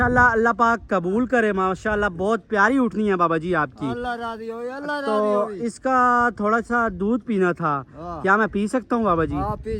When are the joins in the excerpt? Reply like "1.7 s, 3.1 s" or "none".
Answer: none